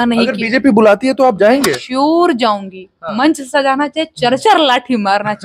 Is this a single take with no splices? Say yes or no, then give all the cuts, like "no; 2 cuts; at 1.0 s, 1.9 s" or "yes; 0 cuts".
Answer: no; 1 cut; at 3.1 s